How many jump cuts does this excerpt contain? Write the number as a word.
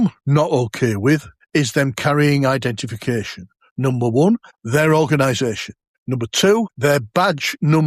zero